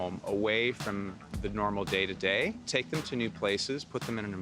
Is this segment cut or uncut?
cut